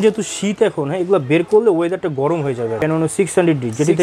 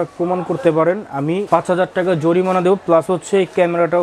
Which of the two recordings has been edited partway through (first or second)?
first